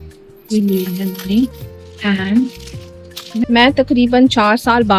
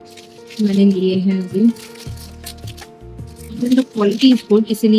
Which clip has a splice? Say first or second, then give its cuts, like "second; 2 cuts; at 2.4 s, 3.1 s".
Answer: first; 1 cut; at 3.4 s